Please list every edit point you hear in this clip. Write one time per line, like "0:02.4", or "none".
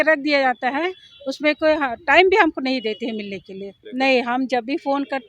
0:03.8